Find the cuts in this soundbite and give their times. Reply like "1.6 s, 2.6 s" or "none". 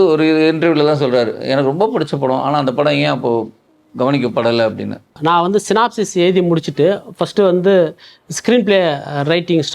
5.1 s